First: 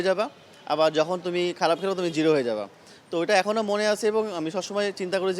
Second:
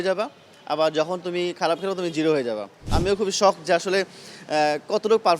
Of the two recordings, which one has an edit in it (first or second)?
second